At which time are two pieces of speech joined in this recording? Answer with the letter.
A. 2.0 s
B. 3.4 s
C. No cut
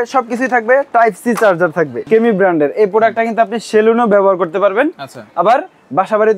A